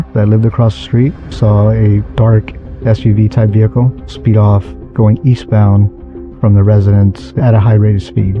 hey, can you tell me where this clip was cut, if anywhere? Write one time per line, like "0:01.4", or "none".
0:01.3
0:04.8